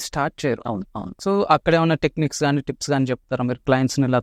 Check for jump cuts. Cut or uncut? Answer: uncut